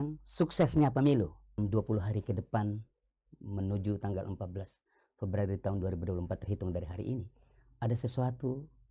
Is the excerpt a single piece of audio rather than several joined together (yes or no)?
no